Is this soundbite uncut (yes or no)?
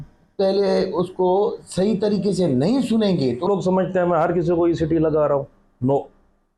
no